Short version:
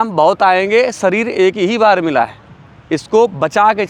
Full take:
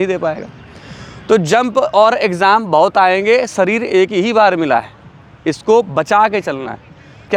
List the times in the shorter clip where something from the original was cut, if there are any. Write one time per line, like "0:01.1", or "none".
none